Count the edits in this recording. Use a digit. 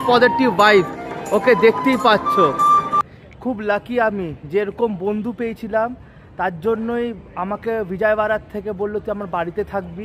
1